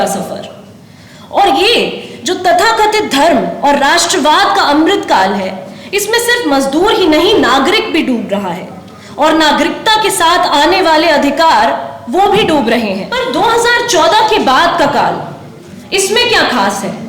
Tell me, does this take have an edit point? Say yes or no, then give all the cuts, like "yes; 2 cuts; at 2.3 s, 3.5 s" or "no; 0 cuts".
yes; 1 cut; at 13.1 s